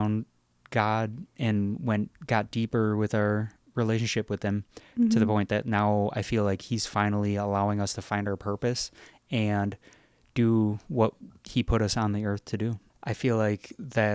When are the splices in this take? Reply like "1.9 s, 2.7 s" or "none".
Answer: none